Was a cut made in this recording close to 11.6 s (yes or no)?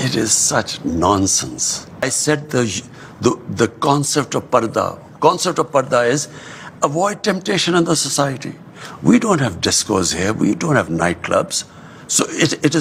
no